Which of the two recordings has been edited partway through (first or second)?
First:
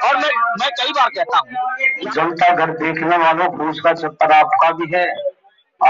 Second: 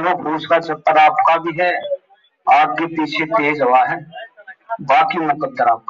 first